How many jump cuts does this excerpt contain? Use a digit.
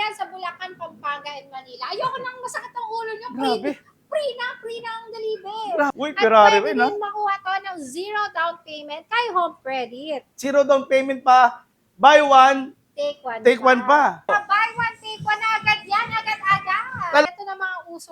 3